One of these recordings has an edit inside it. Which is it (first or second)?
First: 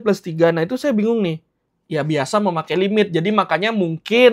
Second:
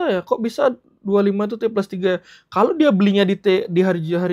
first